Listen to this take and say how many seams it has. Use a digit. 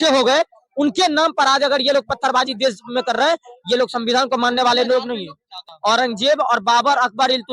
1